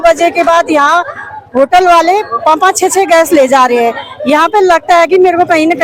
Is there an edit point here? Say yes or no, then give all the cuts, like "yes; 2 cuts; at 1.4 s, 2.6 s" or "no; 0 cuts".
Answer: no; 0 cuts